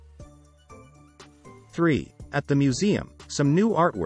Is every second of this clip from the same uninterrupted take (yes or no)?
no